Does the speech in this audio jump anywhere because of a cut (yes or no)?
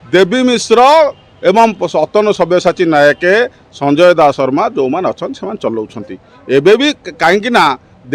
no